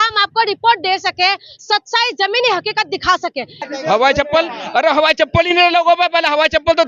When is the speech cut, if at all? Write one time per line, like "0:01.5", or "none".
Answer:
0:03.6